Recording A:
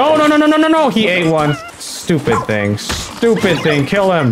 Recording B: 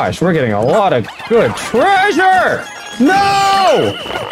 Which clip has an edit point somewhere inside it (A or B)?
A